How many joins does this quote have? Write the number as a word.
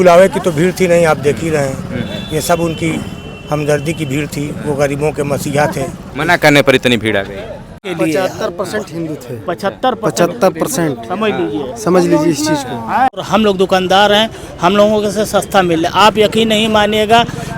two